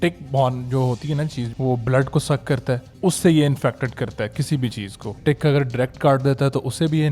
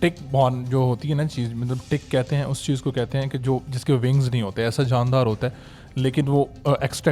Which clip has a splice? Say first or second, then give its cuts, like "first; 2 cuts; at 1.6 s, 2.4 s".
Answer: first; 3 cuts; at 1.5 s, 2.9 s, 5.2 s